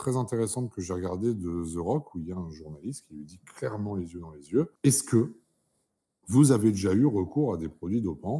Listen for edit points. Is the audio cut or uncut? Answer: cut